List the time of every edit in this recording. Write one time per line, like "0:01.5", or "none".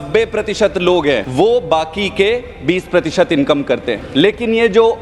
0:01.3
0:04.0